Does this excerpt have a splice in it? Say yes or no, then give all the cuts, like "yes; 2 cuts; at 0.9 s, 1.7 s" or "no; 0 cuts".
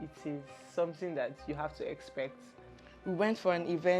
yes; 1 cut; at 2.6 s